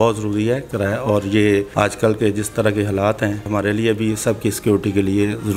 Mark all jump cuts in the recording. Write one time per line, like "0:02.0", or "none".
0:01.7
0:03.5